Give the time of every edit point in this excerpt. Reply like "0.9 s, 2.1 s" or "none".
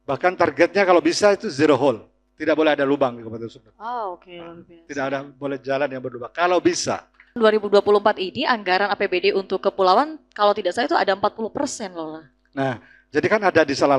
7.4 s